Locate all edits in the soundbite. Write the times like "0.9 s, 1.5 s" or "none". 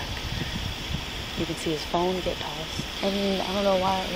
2.9 s